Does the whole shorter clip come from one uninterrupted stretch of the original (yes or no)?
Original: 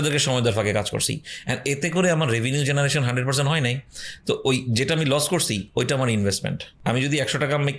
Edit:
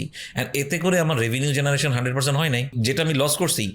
no